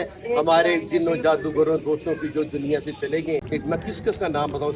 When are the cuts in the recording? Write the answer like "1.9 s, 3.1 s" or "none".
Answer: 3.4 s